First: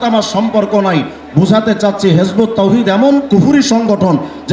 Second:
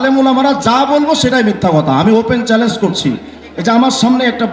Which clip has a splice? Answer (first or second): second